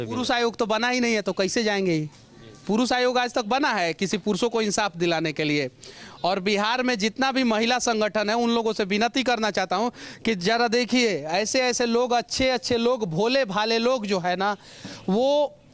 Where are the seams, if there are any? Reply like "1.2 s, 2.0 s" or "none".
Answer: none